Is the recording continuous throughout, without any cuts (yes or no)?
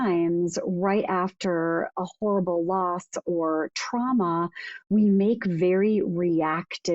yes